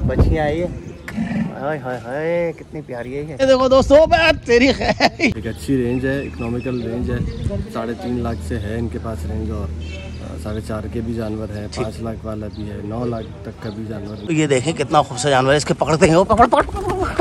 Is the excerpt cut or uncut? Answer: cut